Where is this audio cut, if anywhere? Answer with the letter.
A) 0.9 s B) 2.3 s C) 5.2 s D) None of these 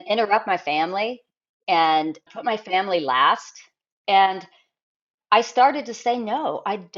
B